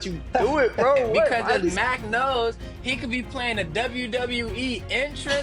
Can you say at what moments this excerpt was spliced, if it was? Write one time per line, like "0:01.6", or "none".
0:01.7